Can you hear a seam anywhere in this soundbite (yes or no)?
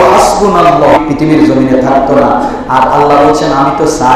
yes